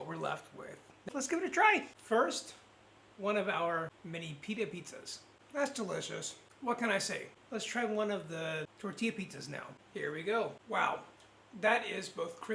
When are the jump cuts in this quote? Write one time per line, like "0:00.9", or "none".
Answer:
0:01.0
0:04.0
0:05.3
0:07.3